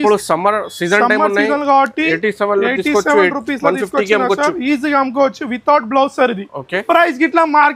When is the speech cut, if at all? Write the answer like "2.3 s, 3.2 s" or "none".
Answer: 6.8 s